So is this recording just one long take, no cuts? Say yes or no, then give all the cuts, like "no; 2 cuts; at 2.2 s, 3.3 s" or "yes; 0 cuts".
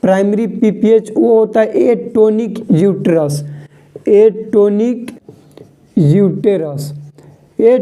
yes; 0 cuts